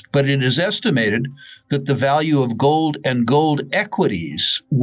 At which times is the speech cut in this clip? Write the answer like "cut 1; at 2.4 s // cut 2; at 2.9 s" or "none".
none